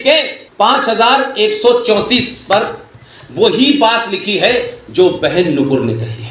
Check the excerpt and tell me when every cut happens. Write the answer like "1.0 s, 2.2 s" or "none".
none